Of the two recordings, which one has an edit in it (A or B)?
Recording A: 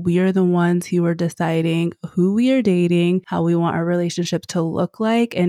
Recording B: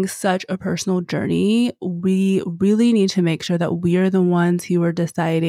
A